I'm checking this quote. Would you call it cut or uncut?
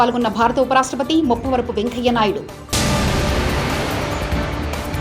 uncut